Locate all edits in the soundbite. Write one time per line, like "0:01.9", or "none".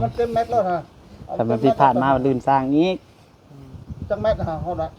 none